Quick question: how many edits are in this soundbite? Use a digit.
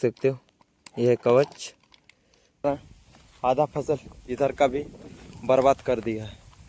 1